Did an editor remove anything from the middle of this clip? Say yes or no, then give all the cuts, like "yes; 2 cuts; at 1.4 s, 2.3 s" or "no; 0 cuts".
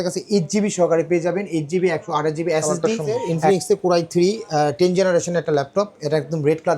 yes; 1 cut; at 3.3 s